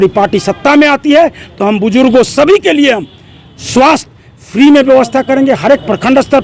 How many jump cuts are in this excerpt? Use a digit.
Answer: 0